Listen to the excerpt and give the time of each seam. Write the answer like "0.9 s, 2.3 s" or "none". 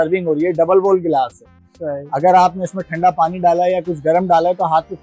none